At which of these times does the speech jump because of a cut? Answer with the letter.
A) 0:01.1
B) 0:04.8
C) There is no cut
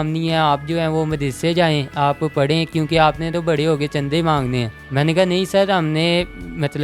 C